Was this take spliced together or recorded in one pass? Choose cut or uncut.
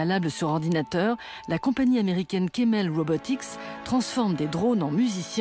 cut